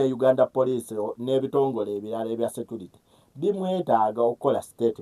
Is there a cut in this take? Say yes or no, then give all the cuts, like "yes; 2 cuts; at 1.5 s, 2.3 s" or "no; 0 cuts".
yes; 1 cut; at 1.0 s